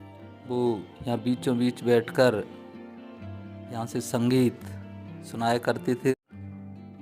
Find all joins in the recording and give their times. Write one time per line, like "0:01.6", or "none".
0:06.1